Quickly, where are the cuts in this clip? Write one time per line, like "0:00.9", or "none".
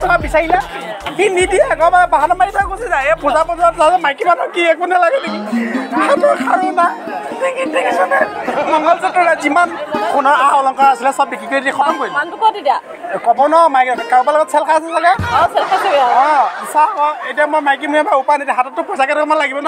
none